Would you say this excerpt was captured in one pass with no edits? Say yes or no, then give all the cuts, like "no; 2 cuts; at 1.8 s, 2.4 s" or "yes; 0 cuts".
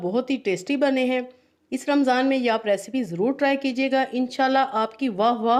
yes; 0 cuts